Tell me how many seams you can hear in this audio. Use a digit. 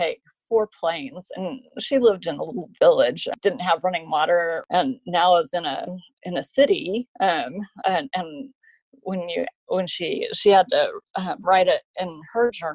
2